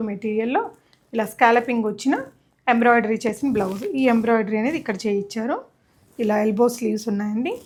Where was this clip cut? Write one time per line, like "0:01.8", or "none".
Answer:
none